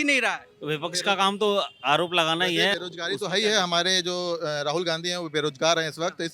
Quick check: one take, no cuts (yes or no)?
no